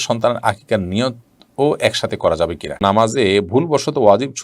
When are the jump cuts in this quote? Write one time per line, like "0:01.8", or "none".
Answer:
0:02.8